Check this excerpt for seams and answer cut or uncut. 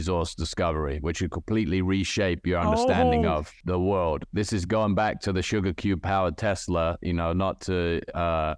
cut